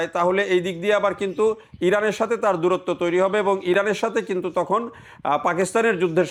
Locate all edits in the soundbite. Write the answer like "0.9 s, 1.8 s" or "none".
none